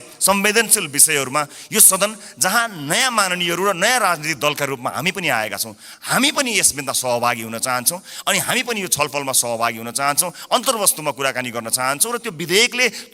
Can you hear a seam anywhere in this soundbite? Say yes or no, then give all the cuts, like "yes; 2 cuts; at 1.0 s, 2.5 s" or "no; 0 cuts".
no; 0 cuts